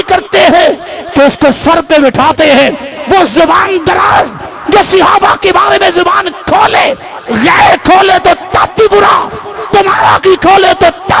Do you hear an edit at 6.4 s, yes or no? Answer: no